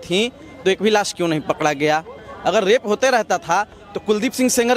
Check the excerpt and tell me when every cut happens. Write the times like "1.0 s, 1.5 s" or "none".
none